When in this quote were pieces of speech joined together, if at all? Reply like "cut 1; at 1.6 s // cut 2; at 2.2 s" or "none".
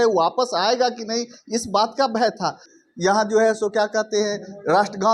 cut 1; at 2.7 s